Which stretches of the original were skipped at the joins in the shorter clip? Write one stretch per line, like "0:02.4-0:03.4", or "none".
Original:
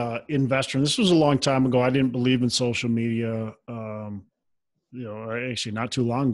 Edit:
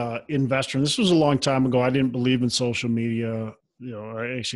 0:03.6-0:04.7